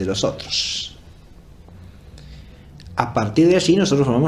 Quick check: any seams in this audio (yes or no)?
yes